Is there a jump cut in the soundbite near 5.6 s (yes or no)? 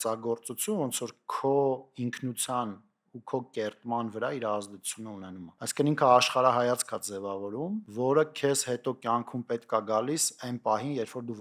yes